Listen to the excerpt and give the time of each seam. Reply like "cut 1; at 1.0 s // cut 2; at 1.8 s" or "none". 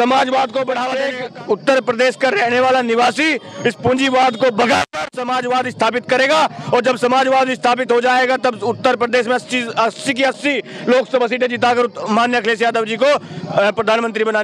cut 1; at 1.0 s